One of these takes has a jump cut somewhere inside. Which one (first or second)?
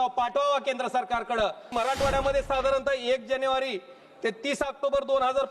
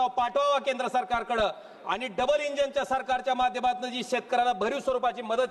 first